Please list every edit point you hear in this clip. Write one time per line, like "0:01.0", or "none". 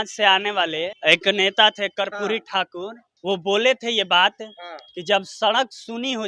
0:00.9
0:03.1